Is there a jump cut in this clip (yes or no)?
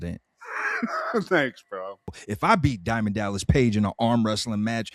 yes